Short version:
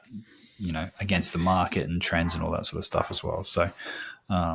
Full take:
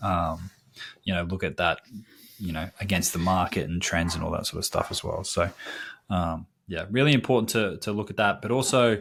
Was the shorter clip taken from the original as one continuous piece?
yes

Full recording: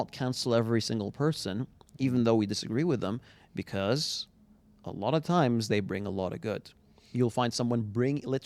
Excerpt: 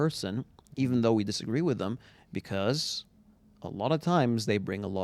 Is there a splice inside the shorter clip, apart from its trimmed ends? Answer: no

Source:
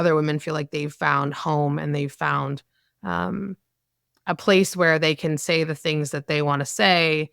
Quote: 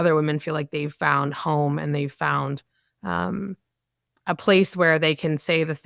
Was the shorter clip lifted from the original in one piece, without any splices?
yes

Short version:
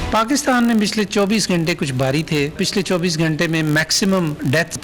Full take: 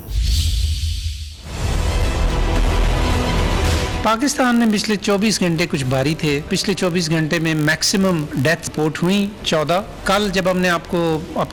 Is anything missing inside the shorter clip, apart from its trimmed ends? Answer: no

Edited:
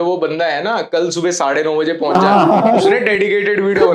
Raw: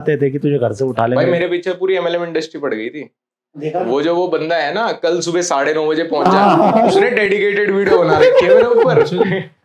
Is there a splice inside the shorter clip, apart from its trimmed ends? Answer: no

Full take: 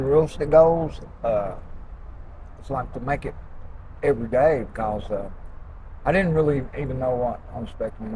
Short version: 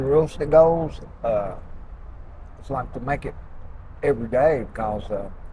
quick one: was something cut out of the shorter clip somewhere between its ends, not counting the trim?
no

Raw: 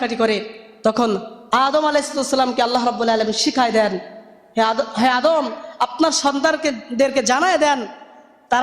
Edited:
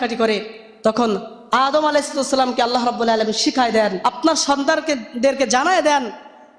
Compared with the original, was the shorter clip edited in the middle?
yes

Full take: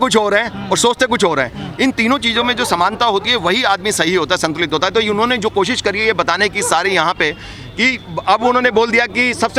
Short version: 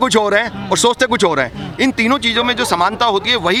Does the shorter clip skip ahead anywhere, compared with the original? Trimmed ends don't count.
no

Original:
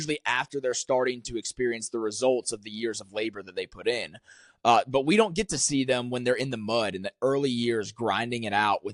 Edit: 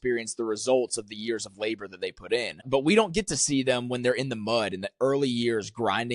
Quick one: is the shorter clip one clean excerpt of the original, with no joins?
no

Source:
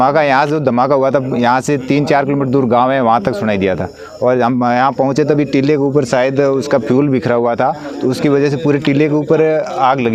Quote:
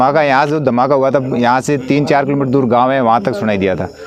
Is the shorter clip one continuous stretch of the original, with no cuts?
yes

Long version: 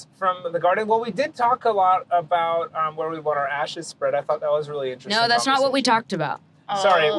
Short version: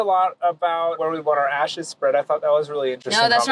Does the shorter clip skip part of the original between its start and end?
yes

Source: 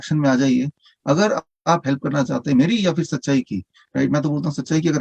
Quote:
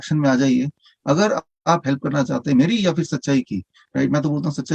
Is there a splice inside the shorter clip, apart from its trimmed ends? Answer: no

